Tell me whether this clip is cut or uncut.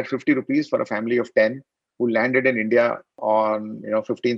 cut